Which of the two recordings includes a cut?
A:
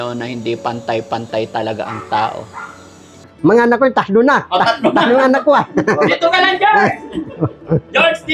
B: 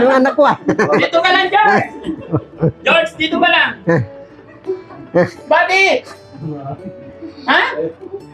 A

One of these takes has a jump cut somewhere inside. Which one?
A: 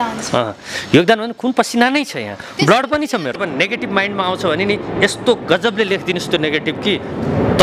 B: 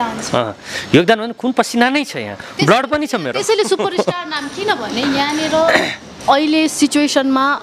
A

